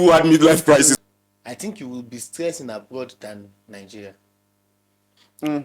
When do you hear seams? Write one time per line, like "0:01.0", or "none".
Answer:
0:01.0